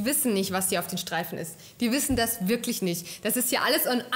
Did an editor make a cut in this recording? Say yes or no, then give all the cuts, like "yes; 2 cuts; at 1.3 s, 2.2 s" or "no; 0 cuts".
no; 0 cuts